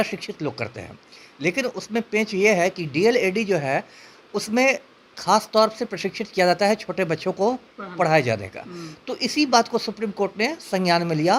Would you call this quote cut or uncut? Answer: uncut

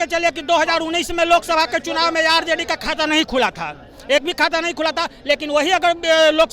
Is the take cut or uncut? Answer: uncut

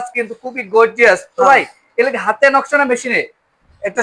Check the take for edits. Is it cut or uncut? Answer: uncut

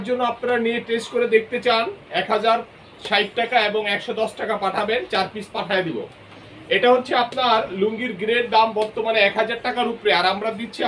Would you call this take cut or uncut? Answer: uncut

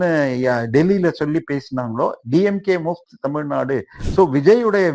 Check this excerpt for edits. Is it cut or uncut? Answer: cut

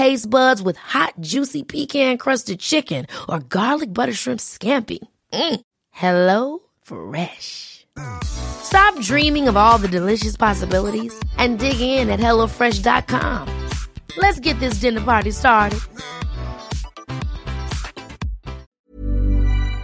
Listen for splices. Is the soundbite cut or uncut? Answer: cut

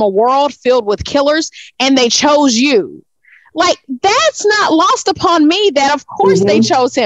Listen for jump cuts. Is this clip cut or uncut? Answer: uncut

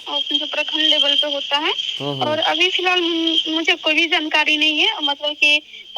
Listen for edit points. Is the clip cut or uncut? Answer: uncut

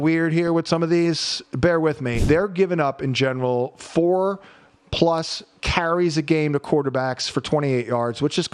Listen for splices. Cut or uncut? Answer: cut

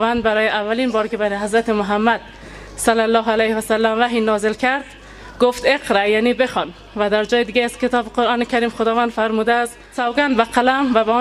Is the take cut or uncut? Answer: cut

